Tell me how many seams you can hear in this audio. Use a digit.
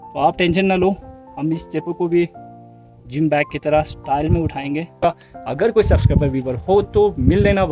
1